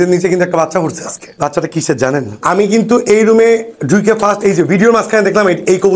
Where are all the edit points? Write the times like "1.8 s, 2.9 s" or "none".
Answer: 2.4 s